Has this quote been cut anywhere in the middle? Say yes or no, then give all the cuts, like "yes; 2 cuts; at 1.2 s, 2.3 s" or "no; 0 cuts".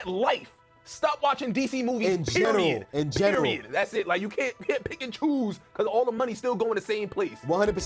no; 0 cuts